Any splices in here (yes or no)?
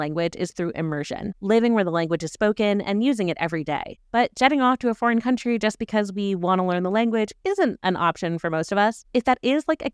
no